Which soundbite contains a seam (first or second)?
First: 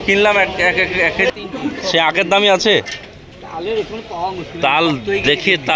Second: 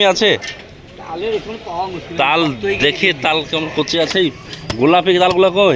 first